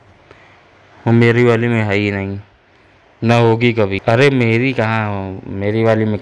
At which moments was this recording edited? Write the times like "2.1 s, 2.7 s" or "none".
2.9 s, 4.0 s